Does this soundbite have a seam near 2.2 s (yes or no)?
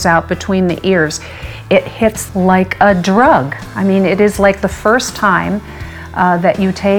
yes